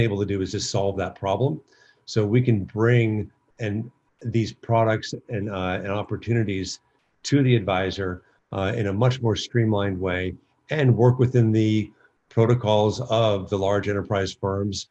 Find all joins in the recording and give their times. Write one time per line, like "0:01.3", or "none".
none